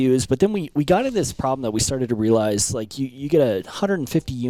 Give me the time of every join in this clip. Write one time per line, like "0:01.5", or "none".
none